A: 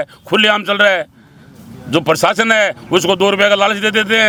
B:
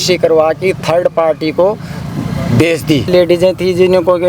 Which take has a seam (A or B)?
B